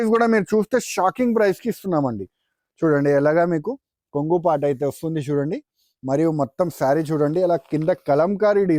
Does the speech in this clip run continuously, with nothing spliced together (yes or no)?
yes